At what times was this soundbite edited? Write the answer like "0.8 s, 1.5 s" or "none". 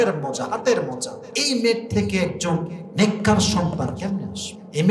none